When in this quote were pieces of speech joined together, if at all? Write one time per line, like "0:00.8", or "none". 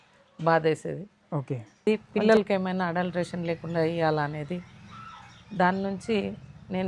0:01.9